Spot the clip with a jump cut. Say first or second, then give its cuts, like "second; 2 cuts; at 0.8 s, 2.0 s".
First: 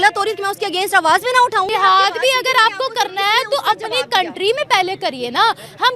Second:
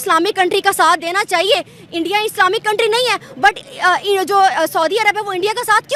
first; 1 cut; at 1.7 s